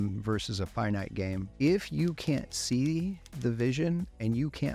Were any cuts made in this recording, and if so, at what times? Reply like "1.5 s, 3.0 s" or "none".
1.4 s